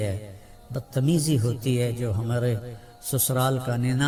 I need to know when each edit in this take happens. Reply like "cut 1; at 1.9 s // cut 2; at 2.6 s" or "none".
none